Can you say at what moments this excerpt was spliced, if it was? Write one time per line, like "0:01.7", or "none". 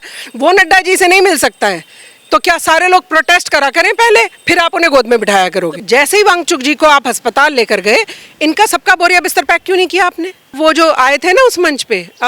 0:05.8
0:10.5

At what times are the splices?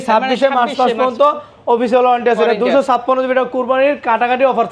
none

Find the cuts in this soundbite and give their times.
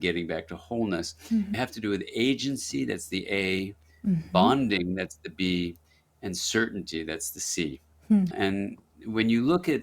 0:01.6

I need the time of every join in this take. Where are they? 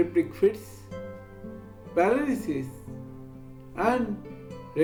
none

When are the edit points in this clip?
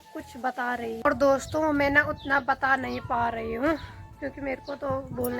0:01.0

